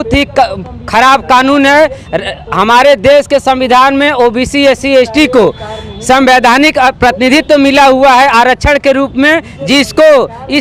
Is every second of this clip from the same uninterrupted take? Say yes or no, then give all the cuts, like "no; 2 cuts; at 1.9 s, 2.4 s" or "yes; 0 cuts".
yes; 0 cuts